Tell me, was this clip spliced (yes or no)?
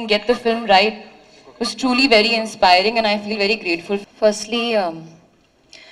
yes